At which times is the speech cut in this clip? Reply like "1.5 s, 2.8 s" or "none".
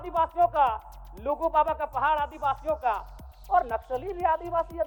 none